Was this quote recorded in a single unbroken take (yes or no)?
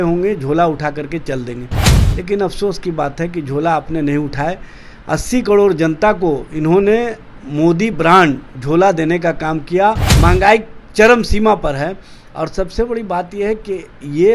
no